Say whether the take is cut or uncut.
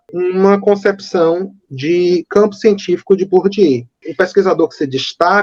cut